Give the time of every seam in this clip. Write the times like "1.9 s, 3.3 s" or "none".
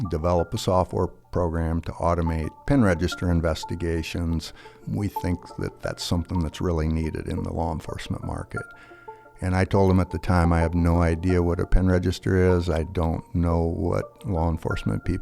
4.7 s